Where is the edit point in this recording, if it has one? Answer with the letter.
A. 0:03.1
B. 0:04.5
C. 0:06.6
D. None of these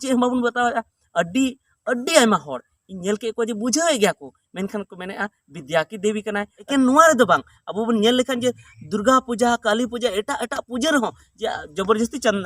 C